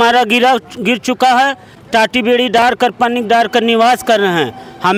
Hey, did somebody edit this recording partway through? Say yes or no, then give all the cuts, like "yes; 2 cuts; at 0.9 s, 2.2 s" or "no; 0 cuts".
no; 0 cuts